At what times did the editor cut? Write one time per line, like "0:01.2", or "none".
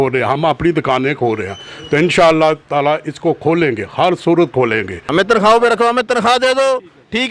0:05.0